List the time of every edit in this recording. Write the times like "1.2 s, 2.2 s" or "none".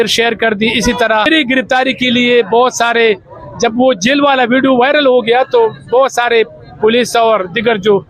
1.3 s